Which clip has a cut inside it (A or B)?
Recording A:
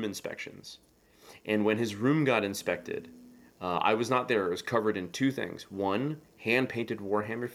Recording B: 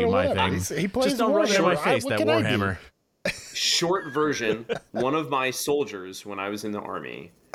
B